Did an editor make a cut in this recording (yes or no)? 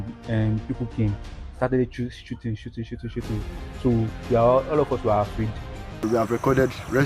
yes